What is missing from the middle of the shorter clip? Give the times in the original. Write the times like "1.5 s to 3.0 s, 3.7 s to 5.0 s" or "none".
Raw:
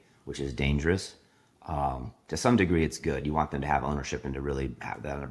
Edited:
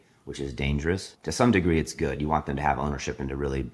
1.1 s to 2.2 s